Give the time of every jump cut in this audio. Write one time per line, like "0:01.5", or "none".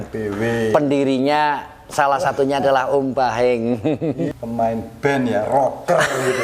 0:04.3